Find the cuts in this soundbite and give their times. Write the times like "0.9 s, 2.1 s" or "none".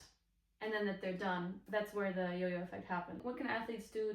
1.6 s, 3.2 s